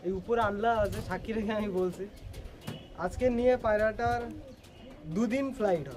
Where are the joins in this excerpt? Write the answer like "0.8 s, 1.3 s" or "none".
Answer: none